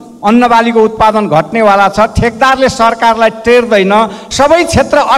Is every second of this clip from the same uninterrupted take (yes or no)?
no